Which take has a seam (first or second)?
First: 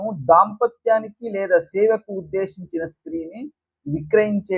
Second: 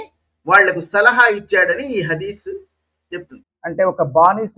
second